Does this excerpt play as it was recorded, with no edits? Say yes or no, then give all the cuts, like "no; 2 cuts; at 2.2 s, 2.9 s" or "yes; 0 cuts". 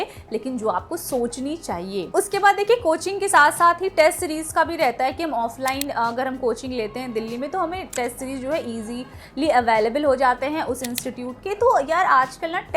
yes; 0 cuts